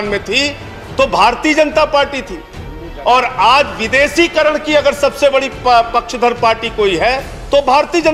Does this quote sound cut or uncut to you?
uncut